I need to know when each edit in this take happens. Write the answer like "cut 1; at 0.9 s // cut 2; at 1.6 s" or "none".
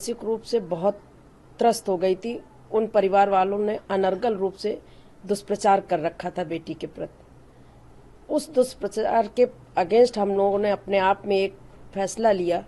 none